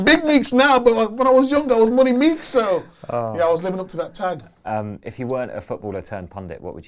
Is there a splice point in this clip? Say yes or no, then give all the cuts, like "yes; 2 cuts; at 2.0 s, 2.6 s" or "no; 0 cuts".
no; 0 cuts